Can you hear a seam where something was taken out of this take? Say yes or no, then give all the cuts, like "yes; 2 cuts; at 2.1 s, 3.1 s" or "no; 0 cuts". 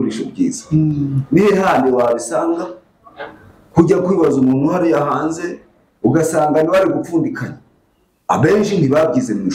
no; 0 cuts